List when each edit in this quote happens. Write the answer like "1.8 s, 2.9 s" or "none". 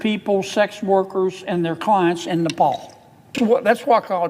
3.3 s